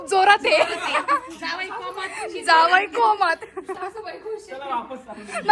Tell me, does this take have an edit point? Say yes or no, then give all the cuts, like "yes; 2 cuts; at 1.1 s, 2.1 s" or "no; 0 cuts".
no; 0 cuts